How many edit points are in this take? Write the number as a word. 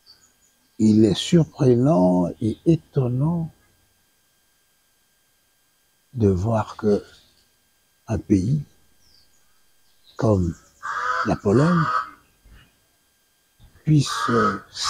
zero